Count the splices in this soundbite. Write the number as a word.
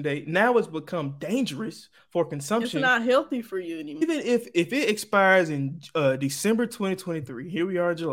one